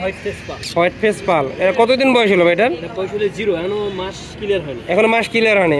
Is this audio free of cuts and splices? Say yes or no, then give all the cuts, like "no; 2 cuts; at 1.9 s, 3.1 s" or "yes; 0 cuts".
yes; 0 cuts